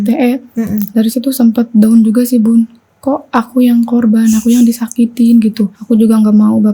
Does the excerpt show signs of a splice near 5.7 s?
yes; 1 cut; at 5.7 s

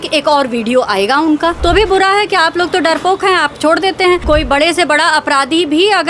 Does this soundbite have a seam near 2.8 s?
no; 2 cuts; at 1.6 s, 4.2 s

